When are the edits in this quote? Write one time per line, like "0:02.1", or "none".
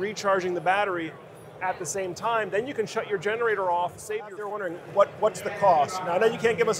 0:04.5